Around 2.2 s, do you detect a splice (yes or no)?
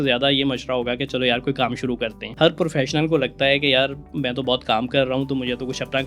yes